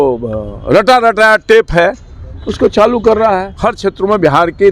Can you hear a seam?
yes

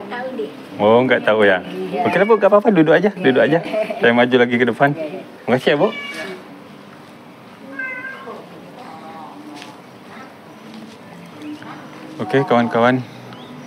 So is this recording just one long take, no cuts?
yes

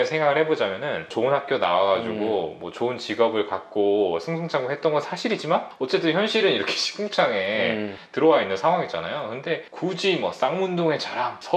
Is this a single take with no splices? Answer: no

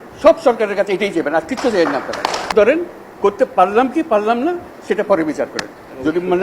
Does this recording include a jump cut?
yes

